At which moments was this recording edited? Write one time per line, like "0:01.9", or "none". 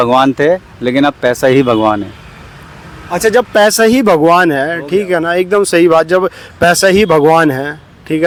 none